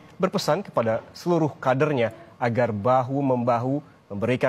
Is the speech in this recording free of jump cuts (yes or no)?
yes